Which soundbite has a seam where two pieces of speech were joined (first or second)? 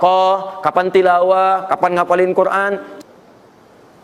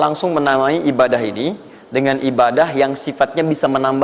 first